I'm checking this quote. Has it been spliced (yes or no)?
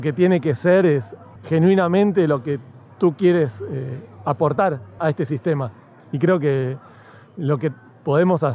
no